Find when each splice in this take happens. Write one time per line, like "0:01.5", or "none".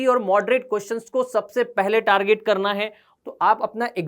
0:03.1